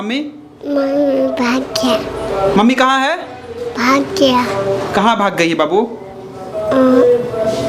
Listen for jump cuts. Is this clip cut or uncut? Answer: uncut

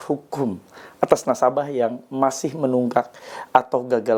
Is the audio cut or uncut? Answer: uncut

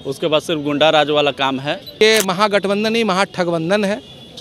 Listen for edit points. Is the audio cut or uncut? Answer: cut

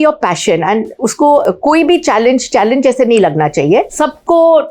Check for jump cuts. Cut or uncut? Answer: cut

